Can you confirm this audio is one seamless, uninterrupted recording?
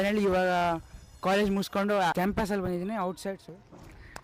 no; 2 cuts; at 2.1 s, 3.4 s

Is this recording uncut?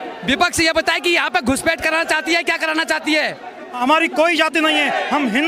no; 1 cut; at 3.8 s

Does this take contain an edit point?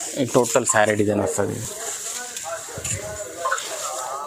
no; 0 cuts

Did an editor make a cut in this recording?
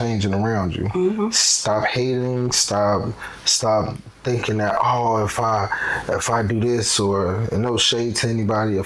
no; 0 cuts

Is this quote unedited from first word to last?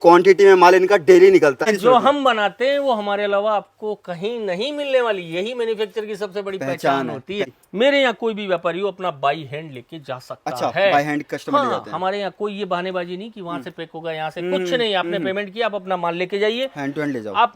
no; 2 cuts; at 1.7 s, 7.5 s

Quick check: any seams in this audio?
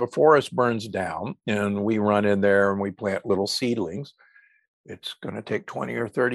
no; 0 cuts

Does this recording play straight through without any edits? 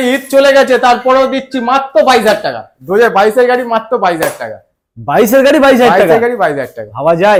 yes; 0 cuts

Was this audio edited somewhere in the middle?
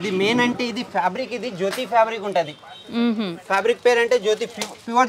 no; 0 cuts

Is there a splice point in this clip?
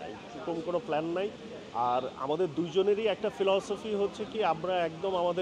no; 0 cuts

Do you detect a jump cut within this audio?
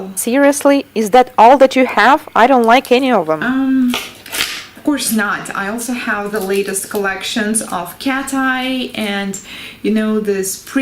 yes; 1 cut; at 8.2 s

